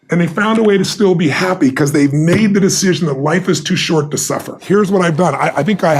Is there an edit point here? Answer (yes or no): yes